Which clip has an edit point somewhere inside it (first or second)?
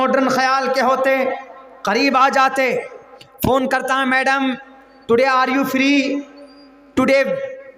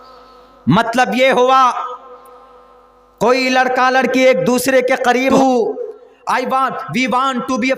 second